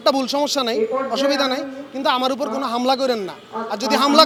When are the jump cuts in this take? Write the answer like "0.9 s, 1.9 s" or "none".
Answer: none

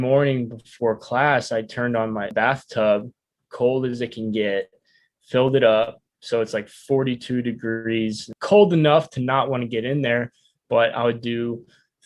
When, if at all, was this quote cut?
2.3 s, 8.3 s

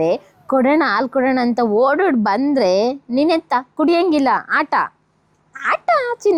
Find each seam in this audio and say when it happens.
none

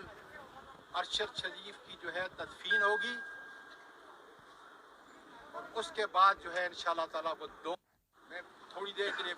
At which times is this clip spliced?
7.8 s

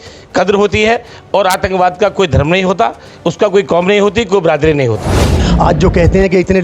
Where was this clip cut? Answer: 5.3 s

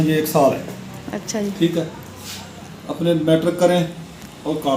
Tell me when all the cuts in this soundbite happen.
none

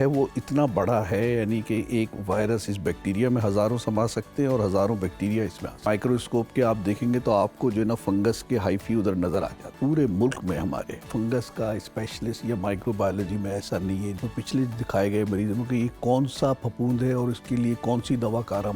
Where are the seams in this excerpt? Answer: 5.9 s, 9.8 s, 11.1 s, 14.2 s

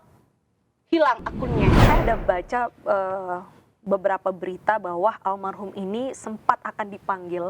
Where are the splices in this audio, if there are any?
1.8 s

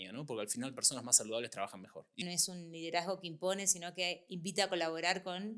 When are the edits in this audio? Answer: 2.1 s

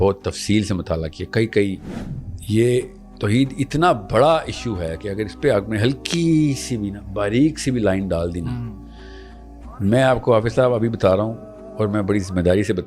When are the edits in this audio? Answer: 1.9 s

